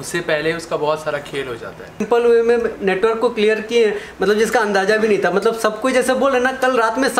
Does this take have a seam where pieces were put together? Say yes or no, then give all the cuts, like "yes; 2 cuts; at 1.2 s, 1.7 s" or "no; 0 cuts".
yes; 1 cut; at 2.0 s